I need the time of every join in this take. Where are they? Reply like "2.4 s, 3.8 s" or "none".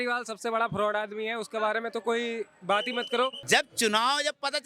3.4 s